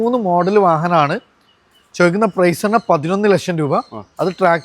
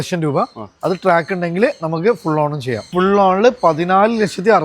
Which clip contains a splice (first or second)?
second